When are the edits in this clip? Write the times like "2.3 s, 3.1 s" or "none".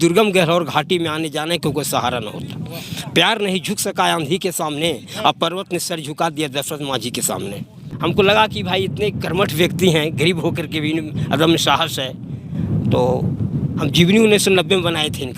7.8 s